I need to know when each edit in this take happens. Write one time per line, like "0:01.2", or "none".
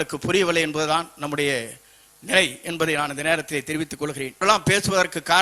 0:04.4